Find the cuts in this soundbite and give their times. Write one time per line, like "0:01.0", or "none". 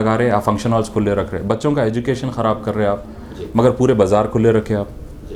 none